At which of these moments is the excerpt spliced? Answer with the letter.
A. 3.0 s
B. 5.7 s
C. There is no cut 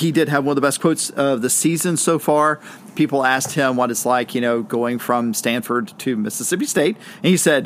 C